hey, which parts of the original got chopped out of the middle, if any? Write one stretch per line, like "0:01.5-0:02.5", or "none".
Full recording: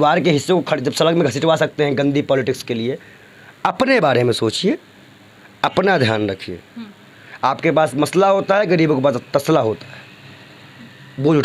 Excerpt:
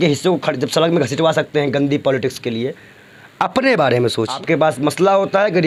0:04.6-0:07.5